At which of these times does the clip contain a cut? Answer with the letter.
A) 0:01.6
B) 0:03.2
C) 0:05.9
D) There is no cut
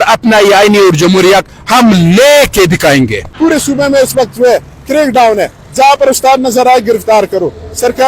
B